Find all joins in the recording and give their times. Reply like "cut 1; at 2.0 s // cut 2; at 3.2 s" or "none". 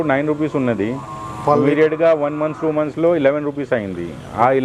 none